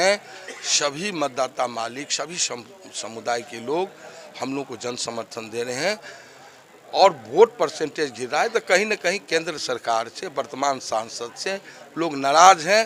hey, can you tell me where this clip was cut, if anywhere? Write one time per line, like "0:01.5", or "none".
none

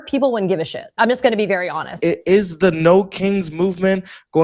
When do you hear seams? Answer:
0:00.9
0:01.9

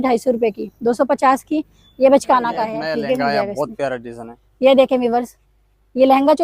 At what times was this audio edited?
0:02.8

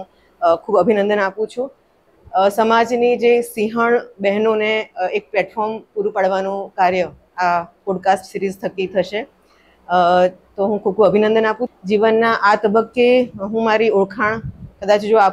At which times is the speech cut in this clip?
0:11.6

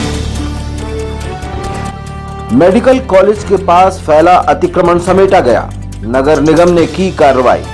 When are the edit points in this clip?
0:01.9

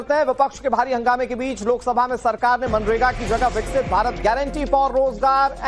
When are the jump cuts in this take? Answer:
0:01.0

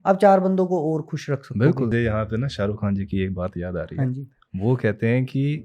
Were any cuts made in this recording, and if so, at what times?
0:01.9

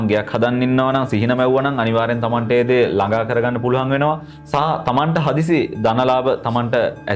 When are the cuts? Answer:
none

